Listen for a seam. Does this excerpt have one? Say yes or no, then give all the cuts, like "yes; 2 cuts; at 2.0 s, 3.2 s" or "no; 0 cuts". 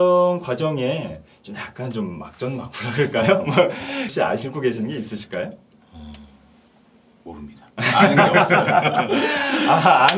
yes; 1 cut; at 4.1 s